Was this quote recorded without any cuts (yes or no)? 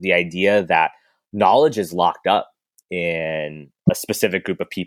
no